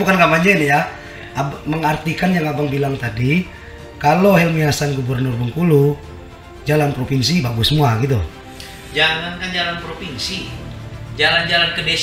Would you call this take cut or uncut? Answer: uncut